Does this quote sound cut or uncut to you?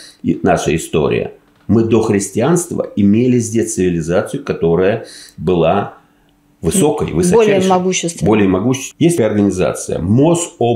cut